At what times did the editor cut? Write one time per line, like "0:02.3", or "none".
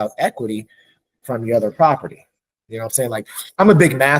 none